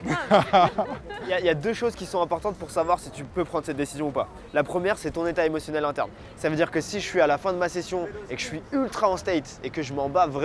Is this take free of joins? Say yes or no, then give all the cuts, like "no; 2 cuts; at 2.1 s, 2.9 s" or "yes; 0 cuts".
no; 1 cut; at 1.3 s